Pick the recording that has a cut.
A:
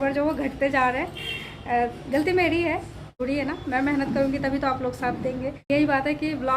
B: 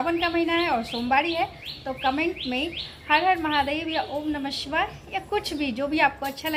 A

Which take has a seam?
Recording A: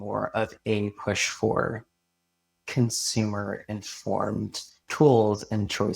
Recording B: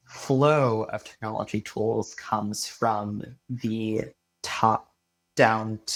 A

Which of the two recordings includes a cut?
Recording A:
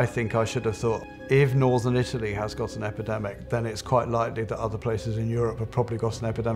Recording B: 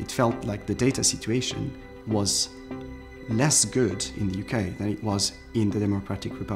A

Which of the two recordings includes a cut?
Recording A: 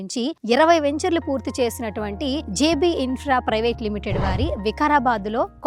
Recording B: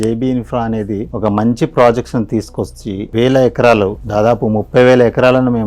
B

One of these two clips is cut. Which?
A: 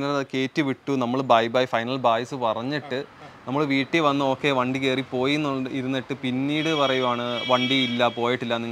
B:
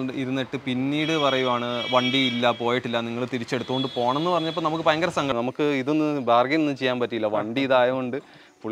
B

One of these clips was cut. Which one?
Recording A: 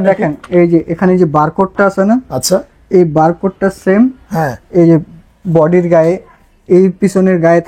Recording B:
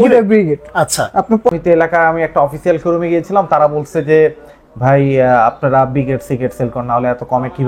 B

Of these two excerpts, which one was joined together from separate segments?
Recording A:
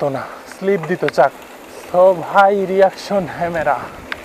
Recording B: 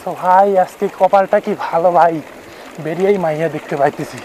A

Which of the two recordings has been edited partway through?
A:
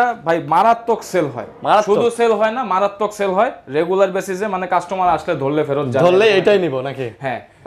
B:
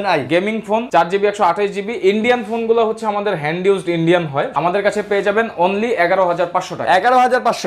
B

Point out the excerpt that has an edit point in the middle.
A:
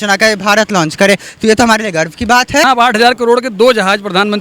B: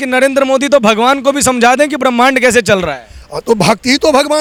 A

